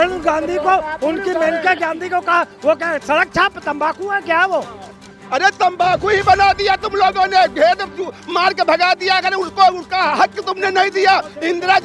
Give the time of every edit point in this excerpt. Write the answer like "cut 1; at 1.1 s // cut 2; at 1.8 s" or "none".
none